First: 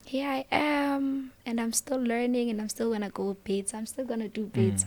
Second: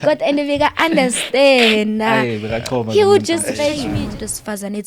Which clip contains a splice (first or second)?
second